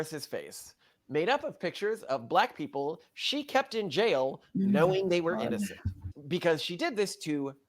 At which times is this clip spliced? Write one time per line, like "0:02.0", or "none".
none